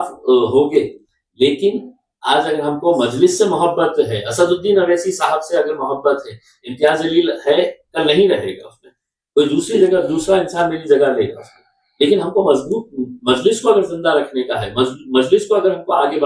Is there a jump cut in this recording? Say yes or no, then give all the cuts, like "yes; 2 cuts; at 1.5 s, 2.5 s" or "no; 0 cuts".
no; 0 cuts